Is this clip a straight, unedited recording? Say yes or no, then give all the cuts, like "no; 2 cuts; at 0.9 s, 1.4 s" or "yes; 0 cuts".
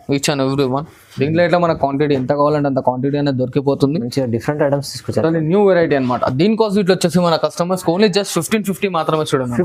yes; 0 cuts